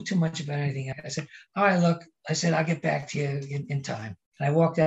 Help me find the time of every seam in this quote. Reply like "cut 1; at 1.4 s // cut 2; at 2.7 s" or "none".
cut 1; at 0.9 s // cut 2; at 3.9 s